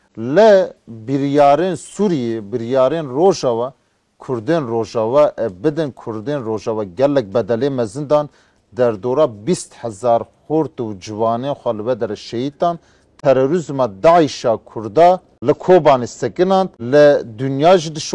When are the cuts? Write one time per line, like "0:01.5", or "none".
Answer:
0:15.3
0:16.8